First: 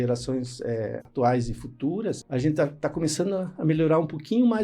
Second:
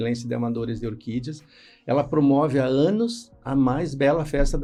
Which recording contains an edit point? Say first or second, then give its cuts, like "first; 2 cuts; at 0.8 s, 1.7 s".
first; 2 cuts; at 1.0 s, 2.2 s